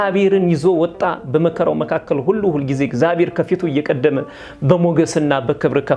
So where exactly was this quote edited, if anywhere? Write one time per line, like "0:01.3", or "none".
none